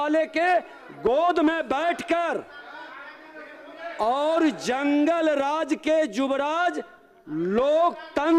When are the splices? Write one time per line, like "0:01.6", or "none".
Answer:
none